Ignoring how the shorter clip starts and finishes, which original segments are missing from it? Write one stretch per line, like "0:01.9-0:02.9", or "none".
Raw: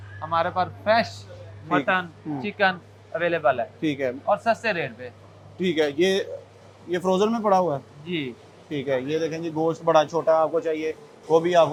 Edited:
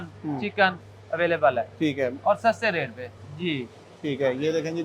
0:05.3-0:07.9